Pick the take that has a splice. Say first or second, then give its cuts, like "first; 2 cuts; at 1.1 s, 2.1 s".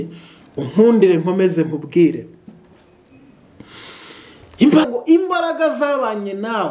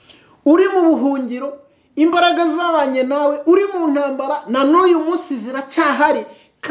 first; 1 cut; at 4.8 s